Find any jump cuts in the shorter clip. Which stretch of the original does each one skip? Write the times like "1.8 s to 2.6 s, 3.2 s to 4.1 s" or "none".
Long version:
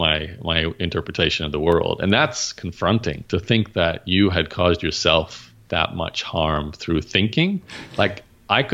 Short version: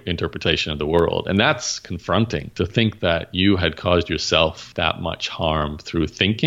5.4 s to 5.6 s

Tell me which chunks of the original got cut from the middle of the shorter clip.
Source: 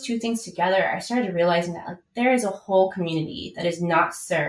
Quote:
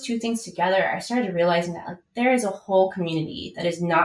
none

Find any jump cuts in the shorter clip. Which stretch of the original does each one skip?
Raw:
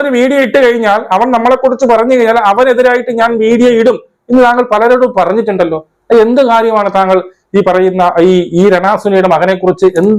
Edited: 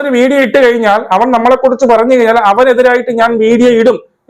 none

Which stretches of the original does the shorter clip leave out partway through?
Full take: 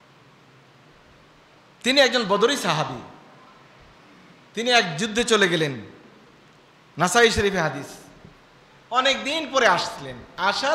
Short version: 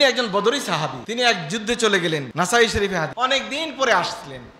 3.0 s to 4.5 s, 5.8 s to 6.9 s, 7.7 s to 8.9 s

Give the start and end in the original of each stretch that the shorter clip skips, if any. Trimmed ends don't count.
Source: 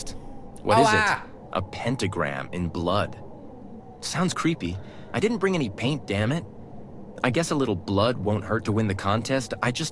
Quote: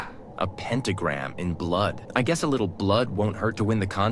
3.2 s to 7.1 s

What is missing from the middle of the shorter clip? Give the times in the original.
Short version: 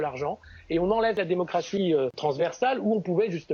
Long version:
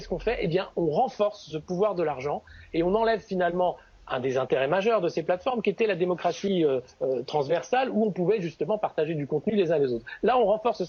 3.2 s to 5.9 s, 6.9 s to 7.3 s

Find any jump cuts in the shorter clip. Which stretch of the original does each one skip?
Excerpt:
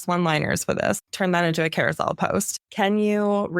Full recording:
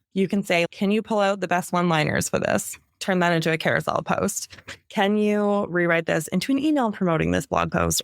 2.7 s to 2.9 s, 4.5 s to 4.8 s

